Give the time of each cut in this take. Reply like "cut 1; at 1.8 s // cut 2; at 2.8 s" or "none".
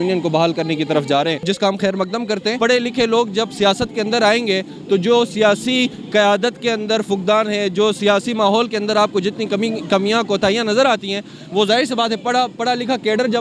cut 1; at 1.4 s // cut 2; at 2.6 s